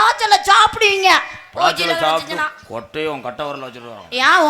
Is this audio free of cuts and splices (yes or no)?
yes